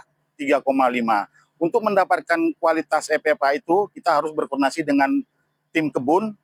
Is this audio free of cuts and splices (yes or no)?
yes